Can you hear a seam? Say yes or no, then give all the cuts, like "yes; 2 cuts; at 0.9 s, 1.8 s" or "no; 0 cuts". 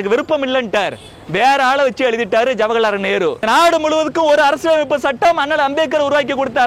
yes; 1 cut; at 3.4 s